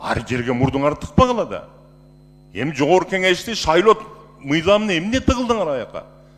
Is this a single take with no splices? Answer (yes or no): yes